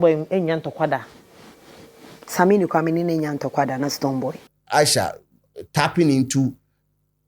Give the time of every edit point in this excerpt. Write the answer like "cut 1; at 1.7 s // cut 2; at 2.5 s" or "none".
cut 1; at 4.5 s